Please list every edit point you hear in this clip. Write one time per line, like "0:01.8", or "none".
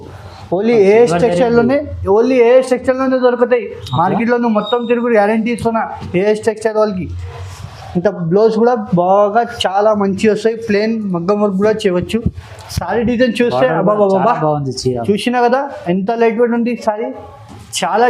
none